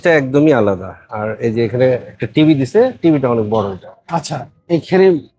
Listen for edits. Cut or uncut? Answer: uncut